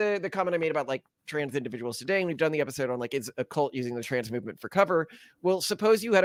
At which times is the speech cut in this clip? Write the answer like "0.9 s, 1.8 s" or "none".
none